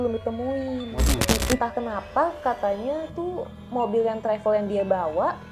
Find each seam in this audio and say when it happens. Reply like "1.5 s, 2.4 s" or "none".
1.2 s

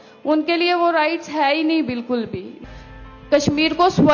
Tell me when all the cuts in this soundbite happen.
2.5 s

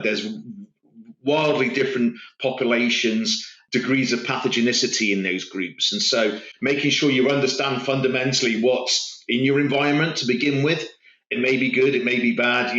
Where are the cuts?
3.6 s

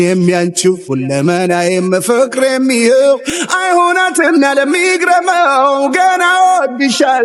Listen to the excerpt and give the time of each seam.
none

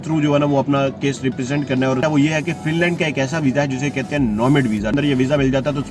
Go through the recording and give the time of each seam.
2.0 s, 4.9 s

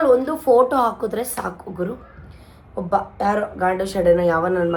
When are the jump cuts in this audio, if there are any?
none

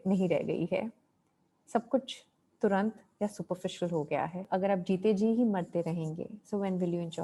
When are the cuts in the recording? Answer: 4.5 s

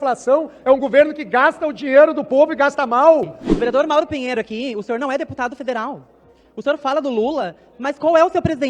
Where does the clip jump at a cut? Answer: 3.4 s

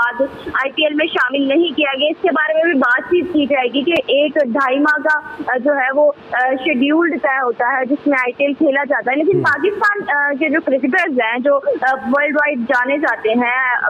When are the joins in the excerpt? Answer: none

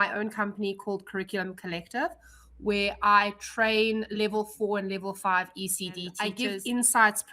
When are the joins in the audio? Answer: 6.1 s

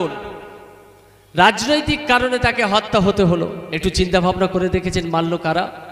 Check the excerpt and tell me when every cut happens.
3.7 s

